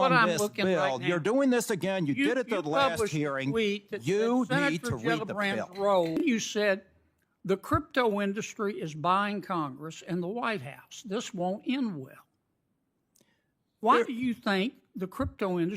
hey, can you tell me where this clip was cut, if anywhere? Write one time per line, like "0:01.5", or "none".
0:06.2